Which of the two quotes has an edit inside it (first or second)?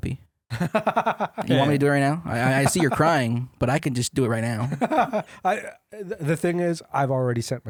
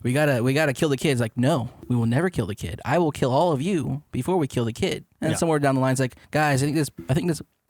second